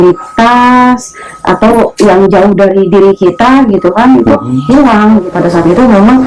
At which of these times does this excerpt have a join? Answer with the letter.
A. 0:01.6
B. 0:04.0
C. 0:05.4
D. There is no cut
C